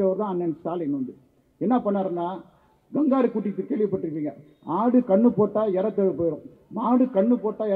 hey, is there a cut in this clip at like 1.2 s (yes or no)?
no